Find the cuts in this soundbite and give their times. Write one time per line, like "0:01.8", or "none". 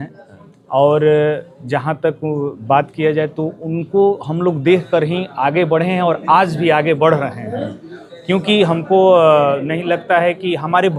none